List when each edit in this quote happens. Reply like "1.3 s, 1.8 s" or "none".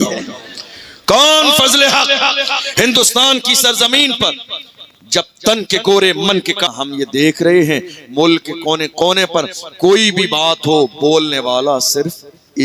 6.7 s